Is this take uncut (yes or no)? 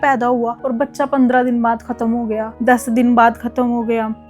yes